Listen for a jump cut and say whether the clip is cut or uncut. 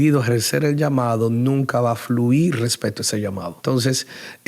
cut